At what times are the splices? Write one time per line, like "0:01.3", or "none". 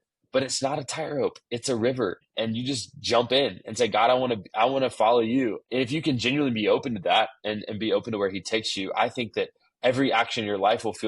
0:02.3
0:05.6